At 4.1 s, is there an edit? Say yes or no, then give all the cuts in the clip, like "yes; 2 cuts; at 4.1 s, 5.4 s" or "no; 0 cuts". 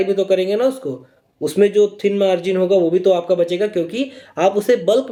no; 0 cuts